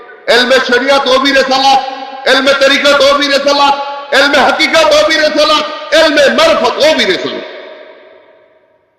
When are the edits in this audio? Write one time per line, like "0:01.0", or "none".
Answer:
none